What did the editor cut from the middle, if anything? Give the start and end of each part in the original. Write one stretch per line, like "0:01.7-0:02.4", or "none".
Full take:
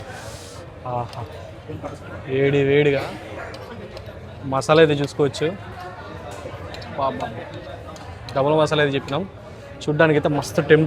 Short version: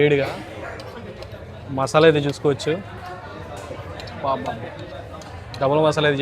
none